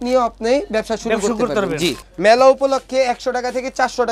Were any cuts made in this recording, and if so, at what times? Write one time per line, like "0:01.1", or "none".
0:02.0